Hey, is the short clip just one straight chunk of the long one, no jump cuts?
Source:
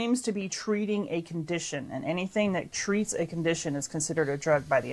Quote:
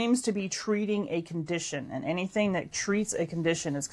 yes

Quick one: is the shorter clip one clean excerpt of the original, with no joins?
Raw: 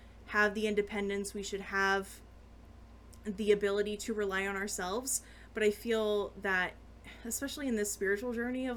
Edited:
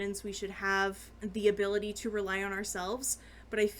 no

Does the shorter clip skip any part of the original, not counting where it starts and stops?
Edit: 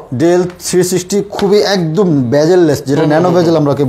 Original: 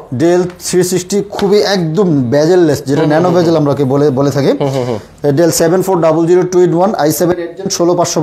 no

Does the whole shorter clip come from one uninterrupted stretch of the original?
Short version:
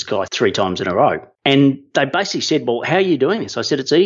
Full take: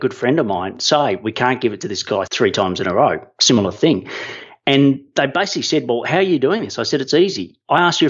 no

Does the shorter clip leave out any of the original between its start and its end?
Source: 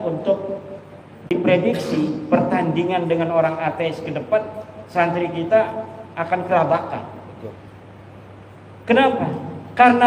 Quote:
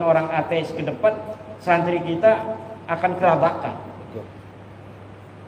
no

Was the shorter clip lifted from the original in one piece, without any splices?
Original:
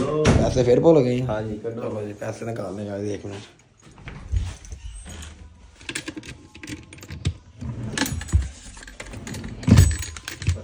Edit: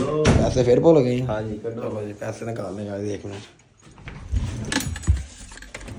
no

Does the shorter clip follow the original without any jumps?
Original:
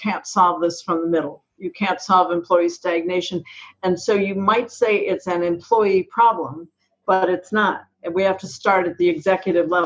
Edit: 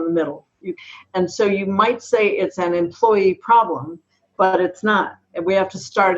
no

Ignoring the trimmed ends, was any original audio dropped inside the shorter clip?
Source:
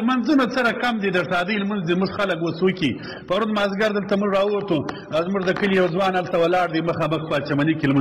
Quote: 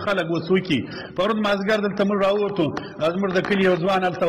no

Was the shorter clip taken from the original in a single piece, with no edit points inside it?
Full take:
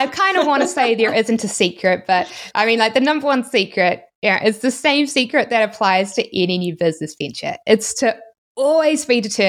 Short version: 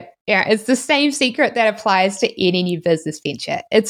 yes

